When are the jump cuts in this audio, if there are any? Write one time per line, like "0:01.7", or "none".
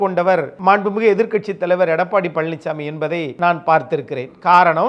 none

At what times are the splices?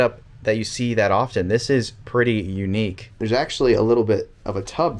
0:03.1

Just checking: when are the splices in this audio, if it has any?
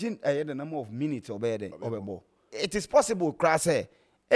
0:02.5

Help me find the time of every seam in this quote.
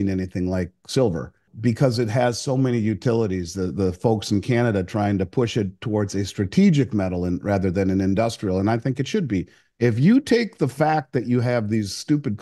0:01.5
0:09.6

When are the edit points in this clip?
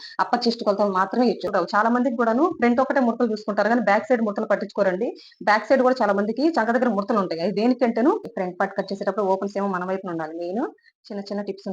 0:01.4
0:08.3

